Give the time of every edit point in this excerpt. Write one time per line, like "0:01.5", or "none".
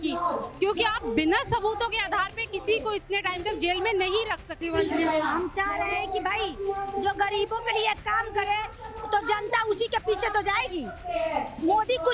0:04.6